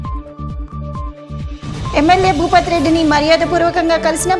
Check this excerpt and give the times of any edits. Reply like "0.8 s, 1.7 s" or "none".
none

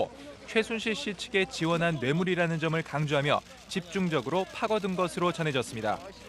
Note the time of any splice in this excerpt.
4.9 s

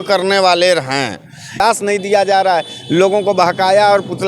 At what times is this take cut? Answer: 1.6 s

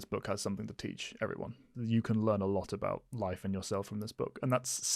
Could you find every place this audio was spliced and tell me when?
1.7 s

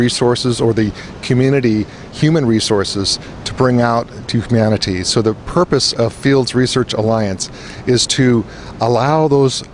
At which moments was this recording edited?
5.7 s

